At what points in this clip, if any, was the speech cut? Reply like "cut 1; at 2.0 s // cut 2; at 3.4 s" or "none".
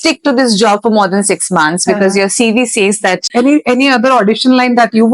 cut 1; at 3.3 s

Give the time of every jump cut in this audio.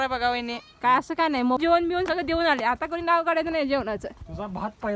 cut 1; at 1.6 s

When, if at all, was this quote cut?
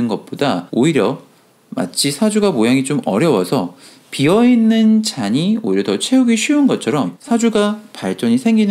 cut 1; at 7.2 s

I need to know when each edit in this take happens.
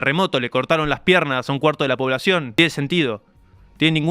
cut 1; at 2.5 s

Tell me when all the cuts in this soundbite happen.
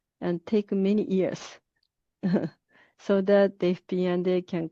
none

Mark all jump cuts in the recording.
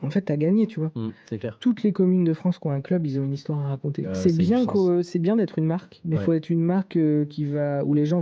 cut 1; at 4.0 s

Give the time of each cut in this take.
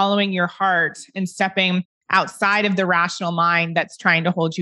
none

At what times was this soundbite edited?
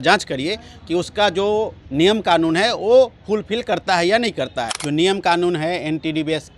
cut 1; at 4.8 s

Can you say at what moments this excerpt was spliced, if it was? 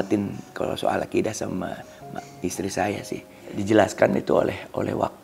cut 1; at 3.6 s

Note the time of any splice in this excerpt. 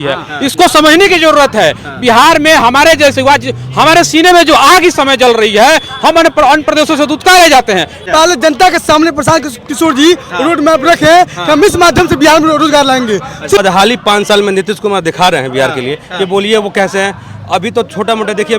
cut 1; at 8.0 s // cut 2; at 13.6 s

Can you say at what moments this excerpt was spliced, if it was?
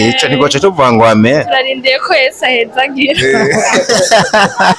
none

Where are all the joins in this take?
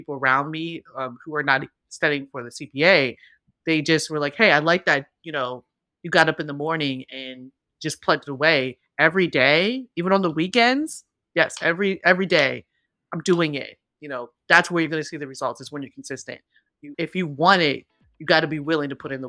none

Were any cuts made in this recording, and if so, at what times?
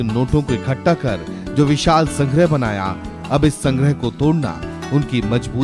cut 1; at 1.3 s

